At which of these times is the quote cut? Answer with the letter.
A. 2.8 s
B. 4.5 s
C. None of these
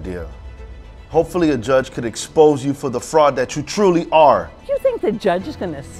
B